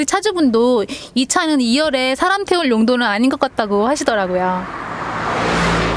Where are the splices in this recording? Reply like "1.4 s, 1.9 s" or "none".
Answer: 4.8 s